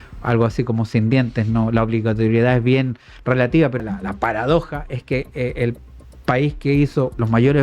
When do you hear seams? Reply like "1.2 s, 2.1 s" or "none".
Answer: 3.8 s

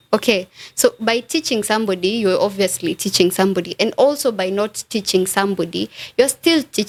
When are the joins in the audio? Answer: none

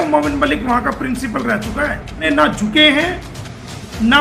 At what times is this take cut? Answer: 2.2 s

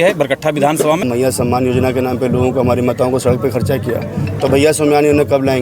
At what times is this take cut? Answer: 1.0 s

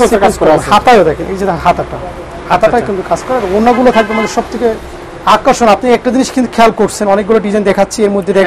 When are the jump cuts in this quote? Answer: none

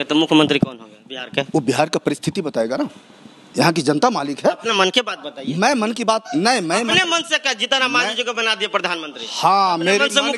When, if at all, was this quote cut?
none

